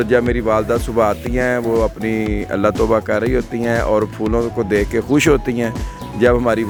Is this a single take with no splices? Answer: yes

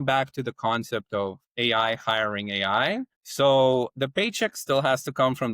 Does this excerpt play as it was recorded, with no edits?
no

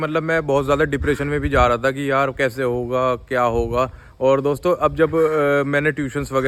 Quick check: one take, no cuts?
yes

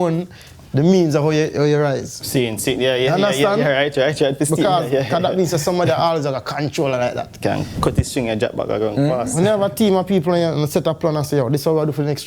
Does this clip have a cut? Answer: no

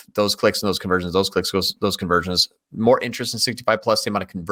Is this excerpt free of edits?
yes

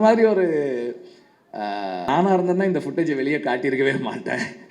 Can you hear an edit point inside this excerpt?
yes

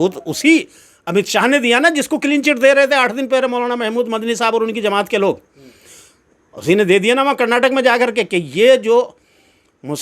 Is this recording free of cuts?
yes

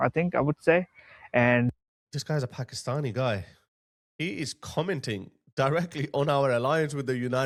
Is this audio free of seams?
yes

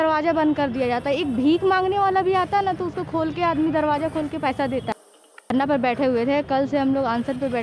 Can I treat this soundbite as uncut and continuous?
no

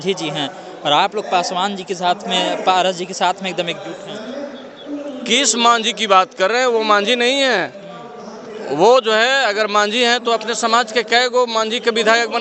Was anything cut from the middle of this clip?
no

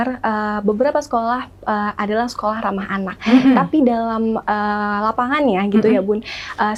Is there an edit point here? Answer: no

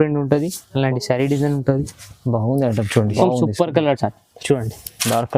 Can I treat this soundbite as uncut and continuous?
no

